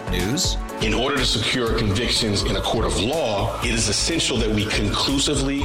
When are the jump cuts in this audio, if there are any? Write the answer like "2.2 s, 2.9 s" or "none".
none